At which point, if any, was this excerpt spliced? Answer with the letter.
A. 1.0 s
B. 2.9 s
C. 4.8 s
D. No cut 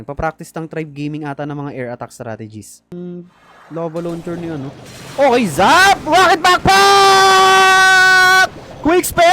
B